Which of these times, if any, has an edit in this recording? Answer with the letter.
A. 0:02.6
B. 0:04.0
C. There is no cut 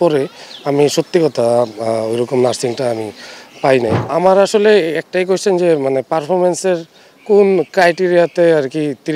B